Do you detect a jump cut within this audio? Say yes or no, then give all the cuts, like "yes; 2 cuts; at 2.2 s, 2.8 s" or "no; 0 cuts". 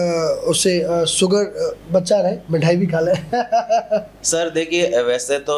no; 0 cuts